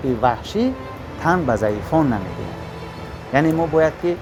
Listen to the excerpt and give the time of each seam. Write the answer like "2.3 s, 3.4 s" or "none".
none